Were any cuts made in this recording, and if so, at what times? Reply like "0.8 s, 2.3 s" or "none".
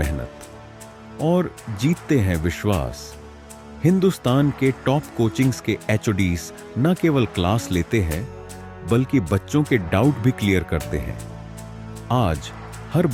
none